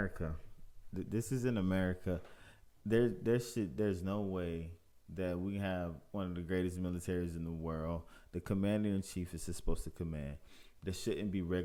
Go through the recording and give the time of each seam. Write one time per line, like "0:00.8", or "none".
none